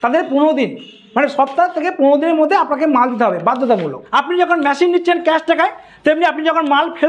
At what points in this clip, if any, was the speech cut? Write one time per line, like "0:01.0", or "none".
0:04.0